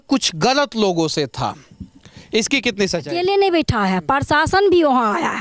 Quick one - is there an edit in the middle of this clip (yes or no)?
yes